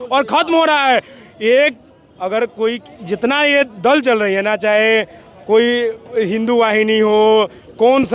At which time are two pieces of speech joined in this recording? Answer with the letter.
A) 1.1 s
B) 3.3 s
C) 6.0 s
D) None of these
D